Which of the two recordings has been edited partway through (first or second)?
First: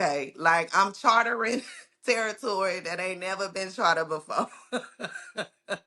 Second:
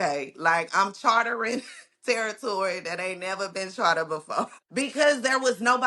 second